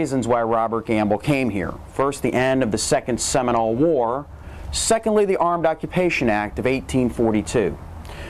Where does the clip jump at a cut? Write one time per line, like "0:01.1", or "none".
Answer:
0:02.4